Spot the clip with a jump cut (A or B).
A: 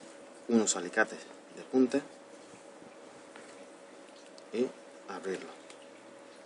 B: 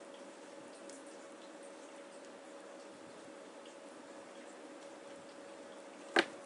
A